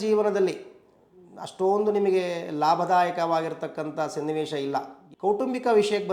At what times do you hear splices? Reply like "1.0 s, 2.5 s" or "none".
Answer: 5.0 s